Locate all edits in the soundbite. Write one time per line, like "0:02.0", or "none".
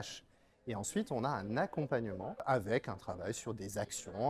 0:02.4

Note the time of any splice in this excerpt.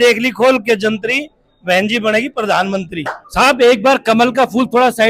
0:03.2

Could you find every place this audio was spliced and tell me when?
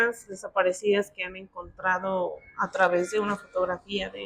none

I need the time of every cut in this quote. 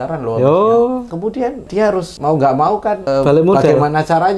0:01.6
0:03.0

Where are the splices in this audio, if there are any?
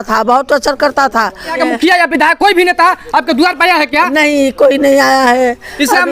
0:01.6

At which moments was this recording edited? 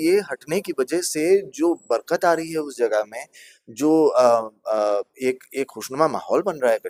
none

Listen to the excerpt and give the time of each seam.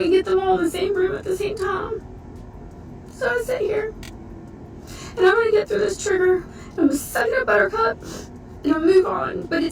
none

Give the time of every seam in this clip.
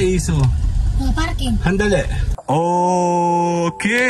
0:02.3

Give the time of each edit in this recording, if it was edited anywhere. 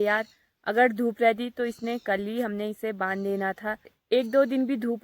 0:04.0

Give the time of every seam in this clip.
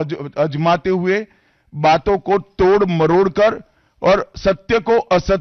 none

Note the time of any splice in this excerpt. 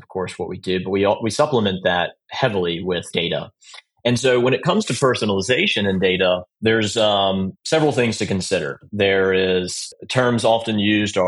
0:03.1
0:06.5
0:07.6
0:08.8
0:09.8

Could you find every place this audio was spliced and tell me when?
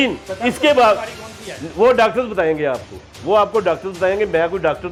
none

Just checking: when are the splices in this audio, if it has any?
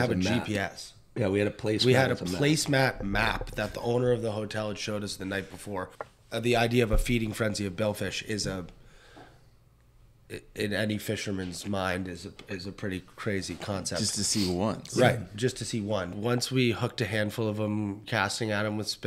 0:06.0
0:16.1

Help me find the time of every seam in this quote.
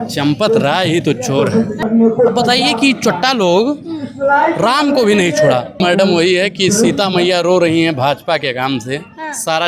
0:01.7
0:05.8

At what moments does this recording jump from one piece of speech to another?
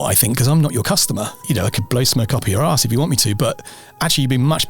0:01.4

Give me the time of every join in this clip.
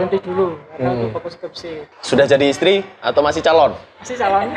0:01.9

